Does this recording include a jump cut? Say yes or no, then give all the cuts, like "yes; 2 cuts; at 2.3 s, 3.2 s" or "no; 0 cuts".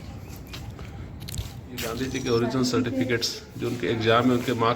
yes; 1 cut; at 1.9 s